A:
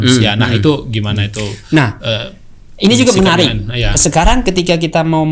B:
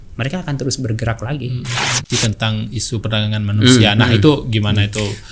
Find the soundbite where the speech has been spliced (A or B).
B